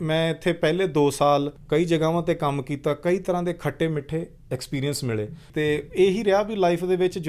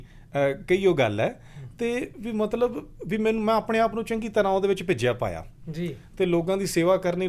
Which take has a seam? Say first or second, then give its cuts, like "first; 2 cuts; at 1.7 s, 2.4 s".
first; 2 cuts; at 1.6 s, 5.4 s